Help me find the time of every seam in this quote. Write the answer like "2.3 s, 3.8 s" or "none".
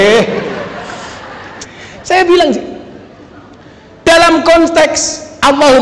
1.7 s